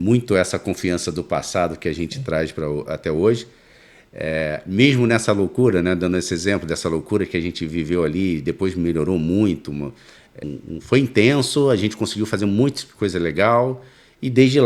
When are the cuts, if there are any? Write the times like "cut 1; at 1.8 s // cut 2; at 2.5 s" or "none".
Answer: cut 1; at 10.4 s